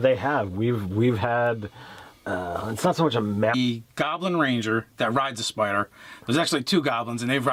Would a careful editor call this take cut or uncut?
uncut